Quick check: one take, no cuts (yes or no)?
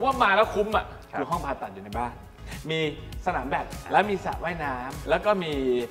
no